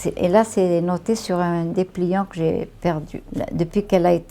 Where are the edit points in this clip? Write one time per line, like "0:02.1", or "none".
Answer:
0:03.2